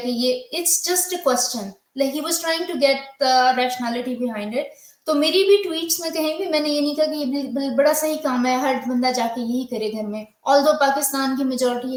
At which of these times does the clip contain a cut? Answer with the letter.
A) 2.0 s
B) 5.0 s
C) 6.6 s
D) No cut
D